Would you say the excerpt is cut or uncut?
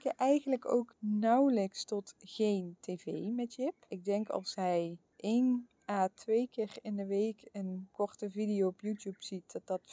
cut